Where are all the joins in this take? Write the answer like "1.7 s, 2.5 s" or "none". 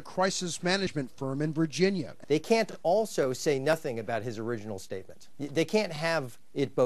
2.1 s, 5.2 s